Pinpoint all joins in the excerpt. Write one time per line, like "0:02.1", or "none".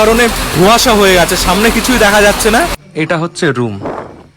0:02.8